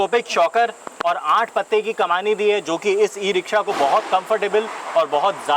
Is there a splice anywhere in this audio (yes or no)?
no